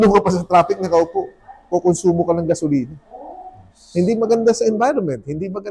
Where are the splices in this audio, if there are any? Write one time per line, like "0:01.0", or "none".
none